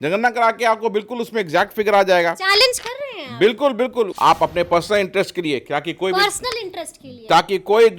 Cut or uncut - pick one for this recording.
cut